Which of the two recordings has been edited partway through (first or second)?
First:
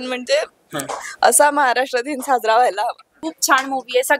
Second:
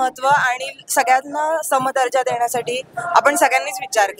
first